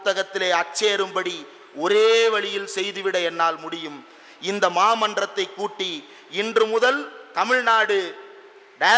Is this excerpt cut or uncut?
uncut